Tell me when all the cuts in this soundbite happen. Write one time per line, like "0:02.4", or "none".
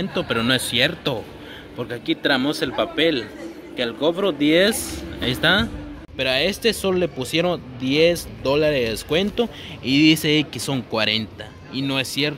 0:06.0